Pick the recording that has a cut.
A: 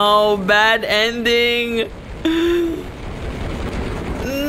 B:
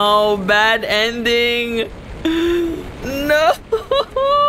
B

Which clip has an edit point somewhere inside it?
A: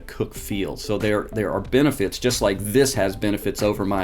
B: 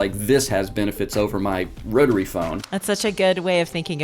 B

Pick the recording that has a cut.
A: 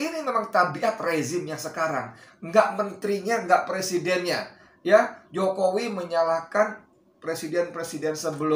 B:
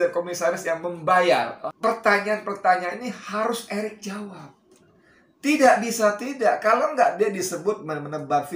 B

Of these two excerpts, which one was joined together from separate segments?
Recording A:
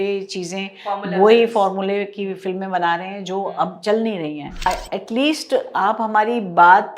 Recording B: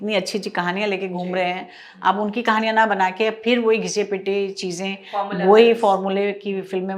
A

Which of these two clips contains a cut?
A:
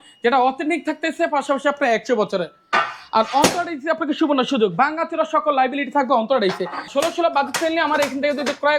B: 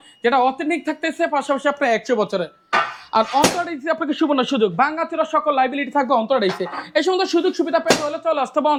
A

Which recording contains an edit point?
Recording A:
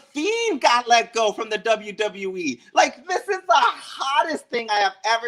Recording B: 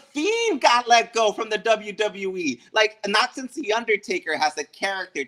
B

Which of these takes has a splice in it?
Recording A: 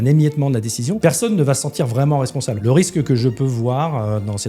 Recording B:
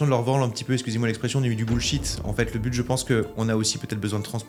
A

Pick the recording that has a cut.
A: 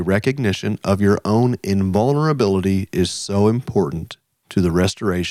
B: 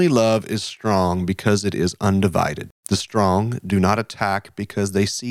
B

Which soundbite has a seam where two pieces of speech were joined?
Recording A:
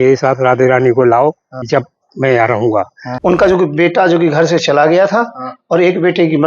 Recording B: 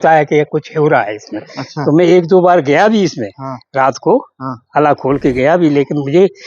A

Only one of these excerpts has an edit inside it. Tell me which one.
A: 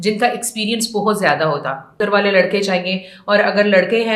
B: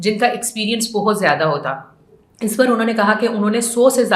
A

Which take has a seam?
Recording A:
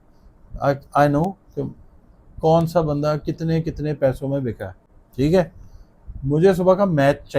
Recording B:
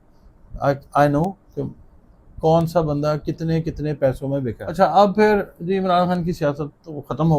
B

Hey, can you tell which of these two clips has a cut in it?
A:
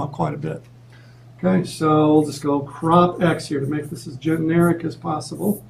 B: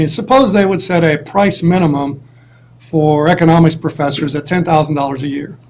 B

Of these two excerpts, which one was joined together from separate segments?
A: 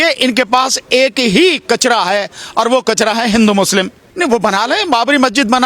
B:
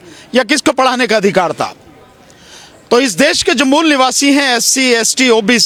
A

